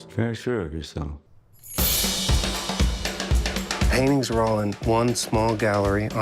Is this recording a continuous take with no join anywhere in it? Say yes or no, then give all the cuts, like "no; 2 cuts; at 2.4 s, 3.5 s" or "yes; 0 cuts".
no; 1 cut; at 1.2 s